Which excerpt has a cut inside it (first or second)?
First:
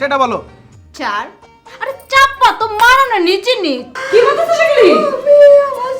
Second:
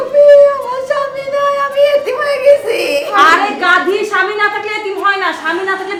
first